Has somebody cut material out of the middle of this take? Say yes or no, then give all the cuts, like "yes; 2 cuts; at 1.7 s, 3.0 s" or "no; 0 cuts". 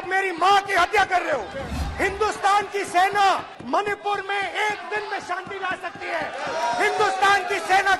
yes; 2 cuts; at 1.7 s, 3.5 s